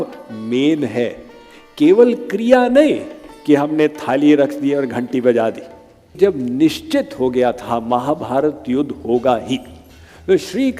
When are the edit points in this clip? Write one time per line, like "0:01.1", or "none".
0:06.2